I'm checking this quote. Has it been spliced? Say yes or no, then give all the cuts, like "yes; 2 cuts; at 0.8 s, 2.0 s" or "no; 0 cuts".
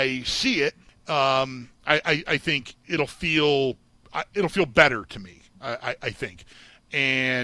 yes; 3 cuts; at 0.9 s, 2.7 s, 6.5 s